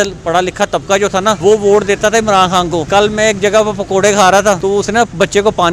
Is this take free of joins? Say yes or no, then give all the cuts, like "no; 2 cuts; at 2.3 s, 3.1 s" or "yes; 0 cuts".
no; 3 cuts; at 1.4 s, 2.9 s, 4.6 s